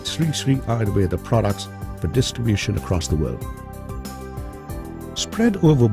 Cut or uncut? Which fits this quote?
uncut